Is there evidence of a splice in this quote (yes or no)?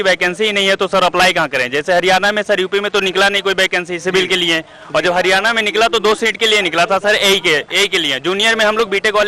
no